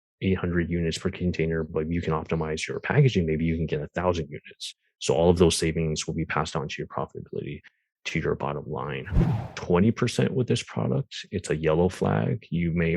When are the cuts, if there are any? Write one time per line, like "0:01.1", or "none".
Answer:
0:09.3